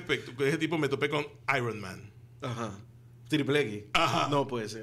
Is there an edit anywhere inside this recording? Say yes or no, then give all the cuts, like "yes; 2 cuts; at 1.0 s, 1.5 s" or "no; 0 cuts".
no; 0 cuts